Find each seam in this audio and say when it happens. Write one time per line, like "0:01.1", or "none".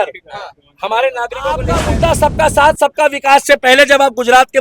0:01.8